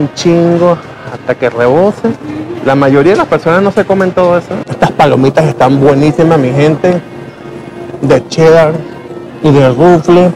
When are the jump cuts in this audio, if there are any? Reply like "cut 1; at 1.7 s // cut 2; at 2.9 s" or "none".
cut 1; at 4.6 s